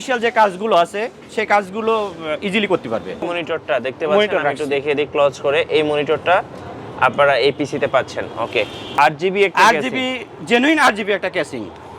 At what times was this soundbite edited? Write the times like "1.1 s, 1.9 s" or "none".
3.3 s, 8.9 s